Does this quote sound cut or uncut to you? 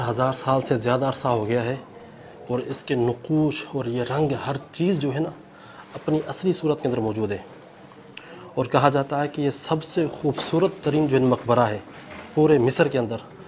uncut